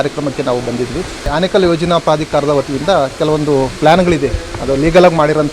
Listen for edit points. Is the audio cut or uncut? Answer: cut